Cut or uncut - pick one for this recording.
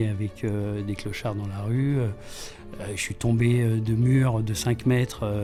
uncut